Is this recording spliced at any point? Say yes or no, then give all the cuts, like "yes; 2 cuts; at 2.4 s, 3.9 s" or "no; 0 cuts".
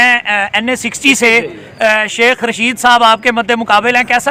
no; 0 cuts